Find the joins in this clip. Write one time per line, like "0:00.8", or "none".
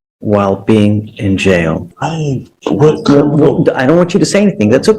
0:01.9